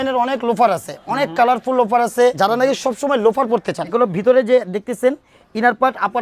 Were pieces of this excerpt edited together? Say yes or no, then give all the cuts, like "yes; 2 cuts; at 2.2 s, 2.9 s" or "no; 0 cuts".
yes; 2 cuts; at 2.4 s, 3.9 s